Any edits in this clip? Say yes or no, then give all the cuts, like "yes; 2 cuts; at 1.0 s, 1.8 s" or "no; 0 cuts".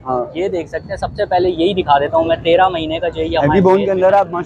no; 0 cuts